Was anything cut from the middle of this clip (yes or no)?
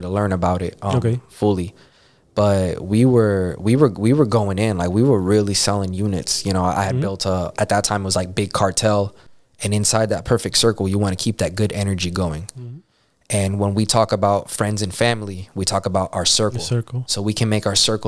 yes